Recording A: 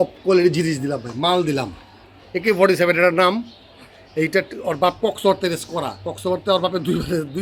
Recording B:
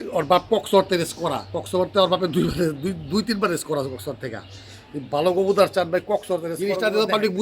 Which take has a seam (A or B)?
B